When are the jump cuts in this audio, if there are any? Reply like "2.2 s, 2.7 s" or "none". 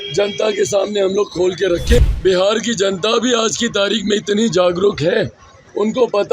2.0 s